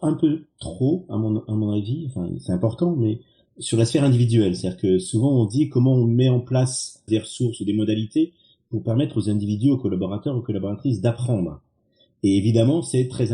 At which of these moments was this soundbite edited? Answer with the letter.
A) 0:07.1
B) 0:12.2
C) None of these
A